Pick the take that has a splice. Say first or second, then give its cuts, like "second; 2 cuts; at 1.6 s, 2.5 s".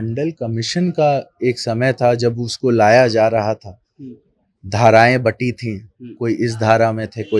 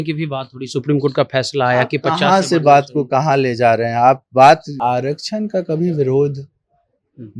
second; 1 cut; at 4.7 s